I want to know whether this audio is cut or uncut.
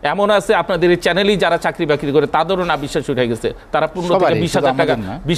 uncut